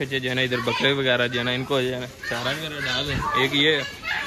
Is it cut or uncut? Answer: uncut